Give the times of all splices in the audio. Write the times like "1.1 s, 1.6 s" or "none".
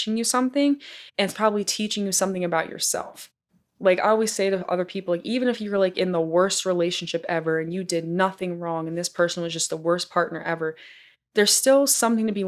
none